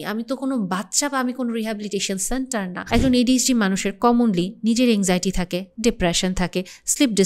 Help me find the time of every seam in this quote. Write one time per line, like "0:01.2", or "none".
0:02.8